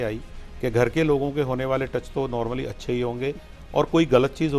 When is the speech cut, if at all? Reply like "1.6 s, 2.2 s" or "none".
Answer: none